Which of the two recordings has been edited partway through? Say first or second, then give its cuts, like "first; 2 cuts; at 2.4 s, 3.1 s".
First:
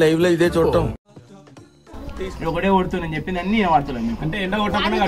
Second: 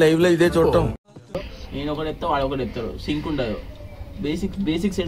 second; 1 cut; at 1.4 s